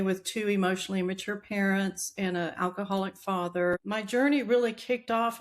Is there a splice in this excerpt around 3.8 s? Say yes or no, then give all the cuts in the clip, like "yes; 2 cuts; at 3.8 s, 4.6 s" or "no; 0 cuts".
yes; 1 cut; at 3.8 s